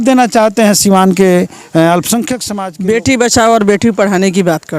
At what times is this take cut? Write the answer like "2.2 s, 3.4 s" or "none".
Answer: 2.4 s